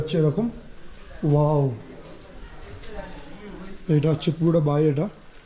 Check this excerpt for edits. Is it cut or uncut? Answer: uncut